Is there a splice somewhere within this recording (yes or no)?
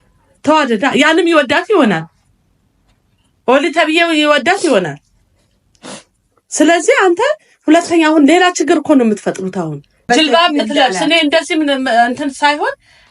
yes